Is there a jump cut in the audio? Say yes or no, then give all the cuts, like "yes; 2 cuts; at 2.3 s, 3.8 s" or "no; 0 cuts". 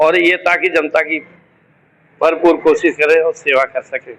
no; 0 cuts